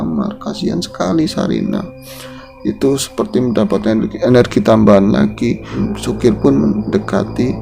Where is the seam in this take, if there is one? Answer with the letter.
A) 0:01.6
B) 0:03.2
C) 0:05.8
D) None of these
C